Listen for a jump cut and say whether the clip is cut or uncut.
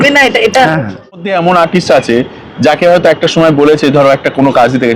cut